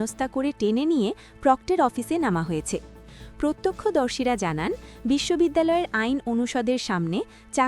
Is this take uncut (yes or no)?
yes